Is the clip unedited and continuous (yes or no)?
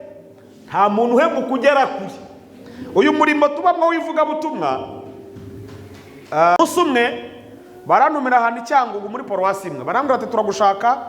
no